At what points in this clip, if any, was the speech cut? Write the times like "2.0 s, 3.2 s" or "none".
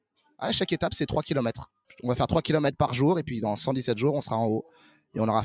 1.9 s

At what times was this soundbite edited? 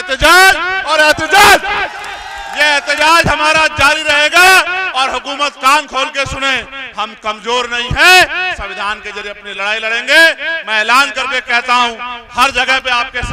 none

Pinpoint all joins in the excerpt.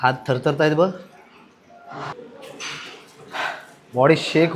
none

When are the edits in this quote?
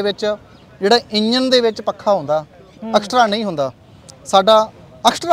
none

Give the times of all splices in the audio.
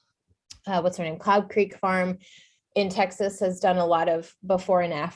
none

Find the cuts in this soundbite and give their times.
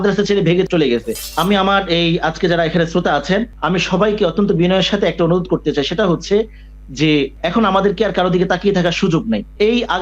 1.2 s

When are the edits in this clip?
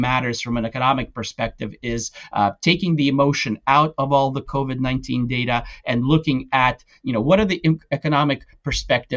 none

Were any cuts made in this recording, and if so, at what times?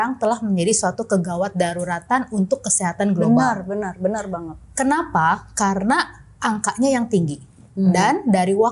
none

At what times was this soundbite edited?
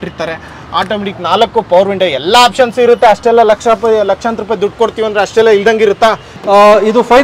6.3 s

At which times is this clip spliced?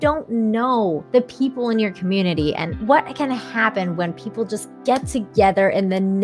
1.0 s, 2.7 s

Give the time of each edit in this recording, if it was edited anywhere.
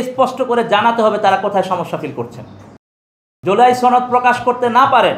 2.7 s

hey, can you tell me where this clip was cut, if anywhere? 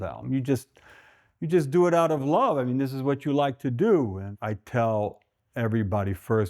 4.3 s

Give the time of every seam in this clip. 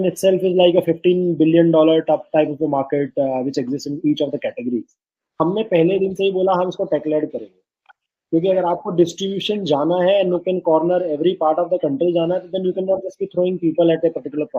5.4 s

